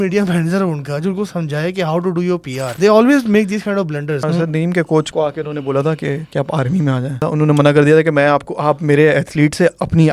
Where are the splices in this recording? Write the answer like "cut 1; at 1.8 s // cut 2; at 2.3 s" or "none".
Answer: cut 1; at 2.7 s // cut 2; at 4.2 s // cut 3; at 5.1 s // cut 4; at 6.2 s // cut 5; at 7.2 s